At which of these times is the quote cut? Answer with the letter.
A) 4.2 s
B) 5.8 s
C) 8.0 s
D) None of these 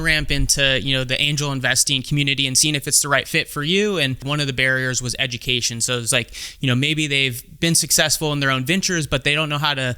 A